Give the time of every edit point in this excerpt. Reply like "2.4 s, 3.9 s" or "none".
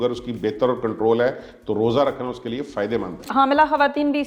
3.2 s